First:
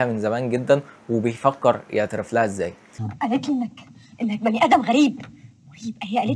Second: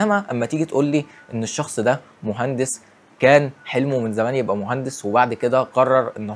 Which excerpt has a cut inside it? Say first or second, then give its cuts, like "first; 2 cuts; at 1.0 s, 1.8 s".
first; 1 cut; at 2.8 s